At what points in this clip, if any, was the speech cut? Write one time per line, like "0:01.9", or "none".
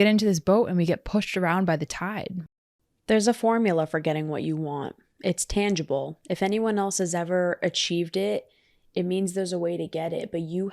0:02.4